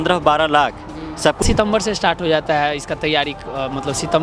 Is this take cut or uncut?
cut